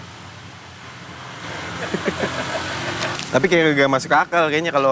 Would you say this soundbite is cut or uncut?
cut